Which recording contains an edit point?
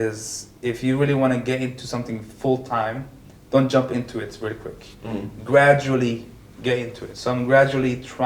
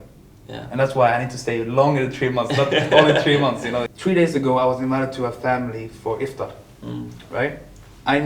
second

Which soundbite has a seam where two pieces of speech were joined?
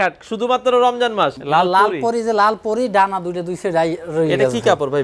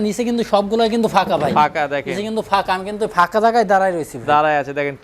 first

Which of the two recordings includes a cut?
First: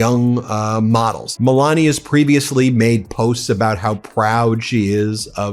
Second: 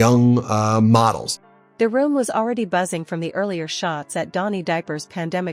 first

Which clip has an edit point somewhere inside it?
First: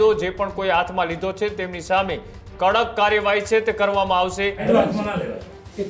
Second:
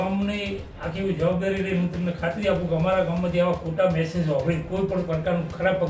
first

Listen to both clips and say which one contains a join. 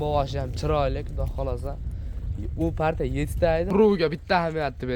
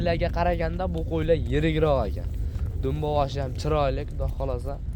first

